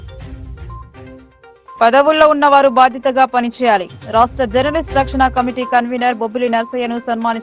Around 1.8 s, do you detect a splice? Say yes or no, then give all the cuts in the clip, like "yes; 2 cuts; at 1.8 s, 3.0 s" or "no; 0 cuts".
no; 0 cuts